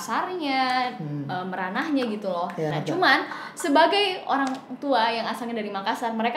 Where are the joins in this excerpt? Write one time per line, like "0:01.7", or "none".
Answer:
0:02.7